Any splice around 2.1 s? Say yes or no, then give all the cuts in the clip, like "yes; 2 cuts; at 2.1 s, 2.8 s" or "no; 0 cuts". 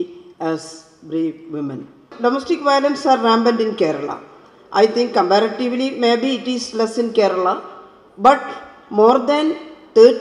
yes; 1 cut; at 2.1 s